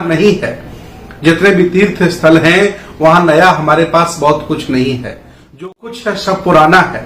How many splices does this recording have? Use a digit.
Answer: 0